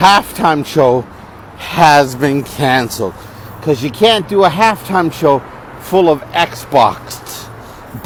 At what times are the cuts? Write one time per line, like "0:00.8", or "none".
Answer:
none